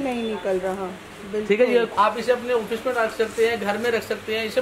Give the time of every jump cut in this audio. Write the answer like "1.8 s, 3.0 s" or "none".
1.9 s

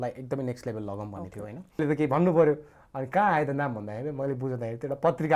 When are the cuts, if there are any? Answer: 1.8 s

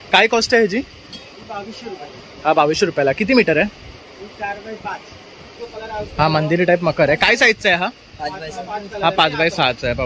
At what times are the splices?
5.6 s

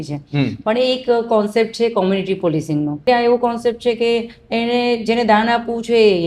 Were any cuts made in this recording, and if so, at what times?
3.0 s

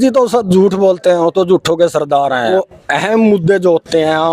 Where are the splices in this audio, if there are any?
2.5 s

